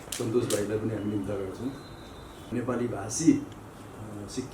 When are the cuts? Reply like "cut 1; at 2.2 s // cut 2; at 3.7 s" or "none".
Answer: cut 1; at 2.5 s